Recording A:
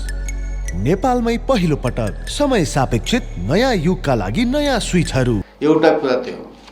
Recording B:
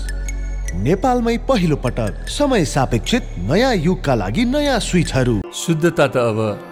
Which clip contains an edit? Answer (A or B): A